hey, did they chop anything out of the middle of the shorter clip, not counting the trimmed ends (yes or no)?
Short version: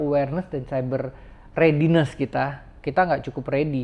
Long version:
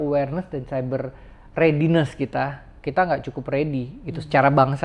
no